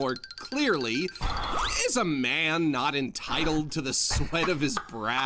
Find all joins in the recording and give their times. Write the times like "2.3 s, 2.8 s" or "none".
none